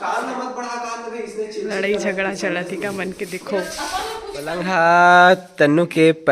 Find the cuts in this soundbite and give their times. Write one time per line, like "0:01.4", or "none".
0:04.6